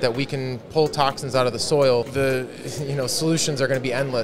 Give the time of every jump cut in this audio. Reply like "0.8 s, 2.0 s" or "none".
2.1 s